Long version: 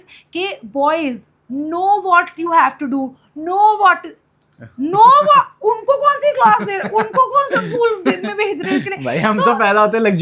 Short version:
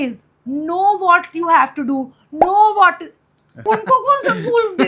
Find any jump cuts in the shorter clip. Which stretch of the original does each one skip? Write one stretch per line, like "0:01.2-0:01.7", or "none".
0:04.5-0:06.8